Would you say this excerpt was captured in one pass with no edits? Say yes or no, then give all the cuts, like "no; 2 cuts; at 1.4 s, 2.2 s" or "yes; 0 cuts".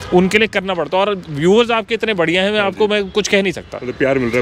yes; 0 cuts